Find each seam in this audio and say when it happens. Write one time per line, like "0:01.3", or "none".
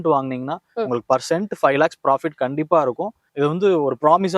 0:03.2